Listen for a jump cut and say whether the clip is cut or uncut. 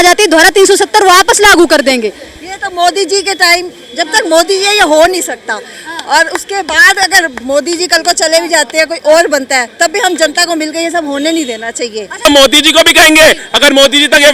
cut